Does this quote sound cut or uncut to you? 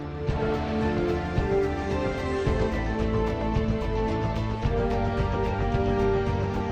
uncut